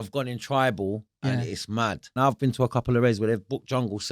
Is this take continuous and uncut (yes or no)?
no